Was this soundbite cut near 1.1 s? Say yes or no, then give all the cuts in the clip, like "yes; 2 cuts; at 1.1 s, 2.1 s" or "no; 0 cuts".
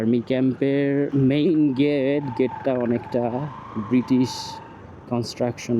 yes; 1 cut; at 1.1 s